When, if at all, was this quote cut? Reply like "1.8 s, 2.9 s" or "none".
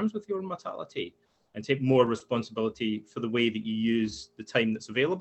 none